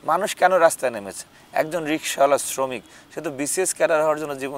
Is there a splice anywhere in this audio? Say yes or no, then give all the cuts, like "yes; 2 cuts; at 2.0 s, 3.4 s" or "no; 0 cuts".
no; 0 cuts